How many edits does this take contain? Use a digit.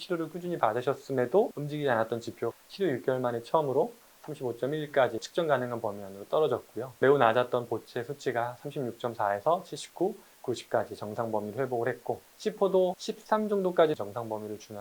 5